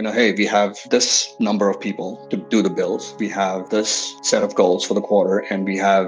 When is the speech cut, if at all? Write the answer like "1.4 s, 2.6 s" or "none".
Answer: none